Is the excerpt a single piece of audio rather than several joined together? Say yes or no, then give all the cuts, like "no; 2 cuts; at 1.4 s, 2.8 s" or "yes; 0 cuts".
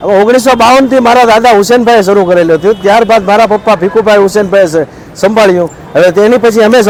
yes; 0 cuts